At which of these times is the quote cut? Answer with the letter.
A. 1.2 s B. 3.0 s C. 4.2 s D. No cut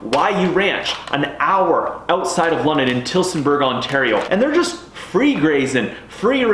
C